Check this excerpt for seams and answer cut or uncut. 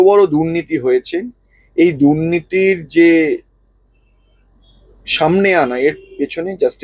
uncut